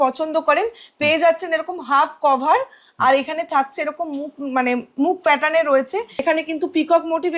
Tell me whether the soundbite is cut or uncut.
cut